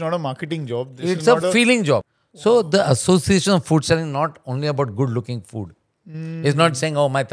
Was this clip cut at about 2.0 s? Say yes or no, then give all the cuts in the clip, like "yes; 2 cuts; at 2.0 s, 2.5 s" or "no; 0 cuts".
yes; 1 cut; at 2.0 s